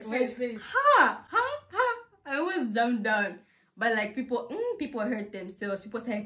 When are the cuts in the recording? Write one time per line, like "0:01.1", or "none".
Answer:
none